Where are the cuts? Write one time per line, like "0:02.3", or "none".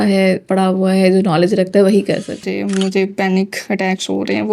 0:02.5